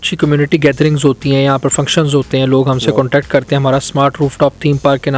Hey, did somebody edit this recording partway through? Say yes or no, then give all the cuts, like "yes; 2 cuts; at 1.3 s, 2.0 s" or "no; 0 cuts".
no; 0 cuts